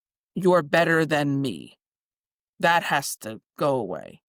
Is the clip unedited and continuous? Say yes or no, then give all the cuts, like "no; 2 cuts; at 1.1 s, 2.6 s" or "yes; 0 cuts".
yes; 0 cuts